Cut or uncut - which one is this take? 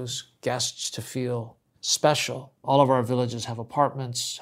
cut